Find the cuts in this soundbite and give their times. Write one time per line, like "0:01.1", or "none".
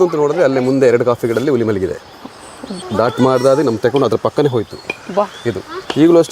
0:02.8